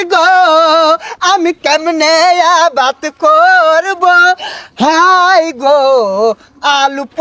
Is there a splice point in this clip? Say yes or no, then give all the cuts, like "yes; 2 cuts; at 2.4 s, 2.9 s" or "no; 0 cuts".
no; 0 cuts